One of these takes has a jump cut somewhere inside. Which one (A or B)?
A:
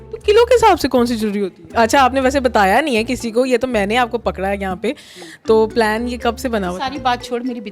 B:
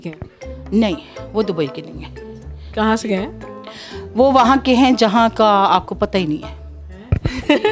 A